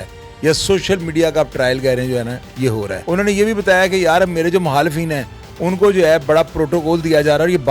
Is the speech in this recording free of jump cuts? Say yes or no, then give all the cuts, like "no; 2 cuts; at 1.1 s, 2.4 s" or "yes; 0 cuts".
no; 1 cut; at 2.9 s